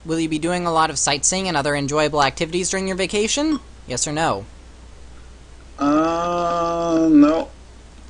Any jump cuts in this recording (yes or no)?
yes